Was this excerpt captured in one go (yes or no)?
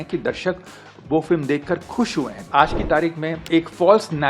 no